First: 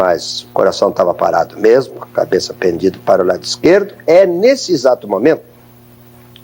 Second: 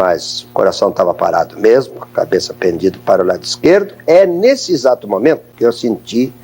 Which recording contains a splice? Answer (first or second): second